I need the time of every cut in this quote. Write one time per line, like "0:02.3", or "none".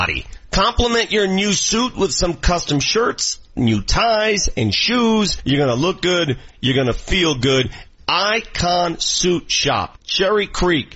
none

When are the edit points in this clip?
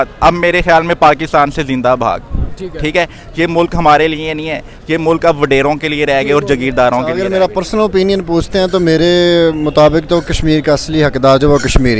0:07.1

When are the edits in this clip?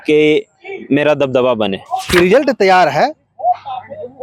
0:02.0

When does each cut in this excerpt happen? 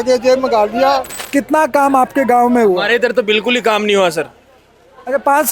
0:01.2

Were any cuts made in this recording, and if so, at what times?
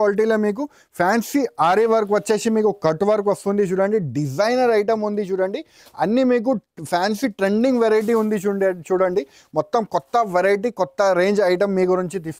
none

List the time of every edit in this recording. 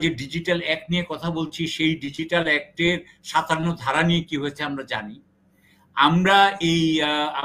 none

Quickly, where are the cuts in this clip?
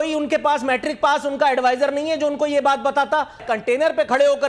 0:03.4

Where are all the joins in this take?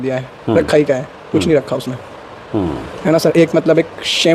none

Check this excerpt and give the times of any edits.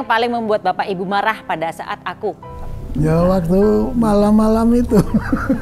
0:02.5

